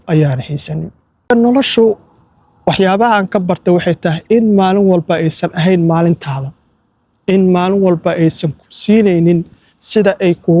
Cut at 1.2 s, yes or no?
yes